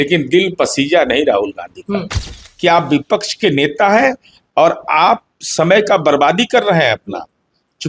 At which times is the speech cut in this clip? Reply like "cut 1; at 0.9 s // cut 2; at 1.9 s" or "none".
cut 1; at 2.4 s